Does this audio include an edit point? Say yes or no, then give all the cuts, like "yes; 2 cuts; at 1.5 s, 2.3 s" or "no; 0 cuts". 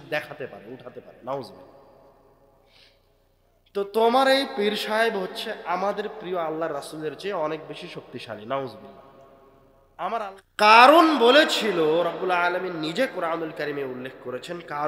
yes; 1 cut; at 10.3 s